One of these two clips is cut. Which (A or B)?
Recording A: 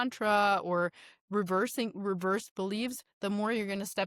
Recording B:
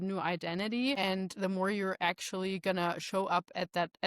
B